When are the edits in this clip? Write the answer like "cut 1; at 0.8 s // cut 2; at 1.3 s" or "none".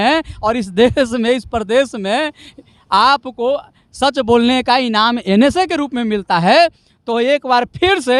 none